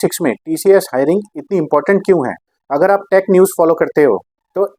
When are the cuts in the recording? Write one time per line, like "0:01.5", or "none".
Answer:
none